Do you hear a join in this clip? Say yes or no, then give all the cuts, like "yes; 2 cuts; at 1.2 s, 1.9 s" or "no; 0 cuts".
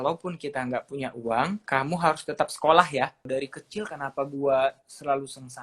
yes; 2 cuts; at 1.6 s, 3.3 s